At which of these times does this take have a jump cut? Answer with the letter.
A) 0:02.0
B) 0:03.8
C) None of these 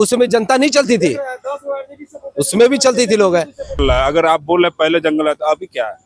B